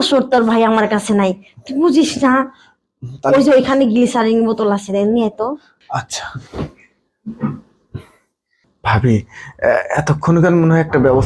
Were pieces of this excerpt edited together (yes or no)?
no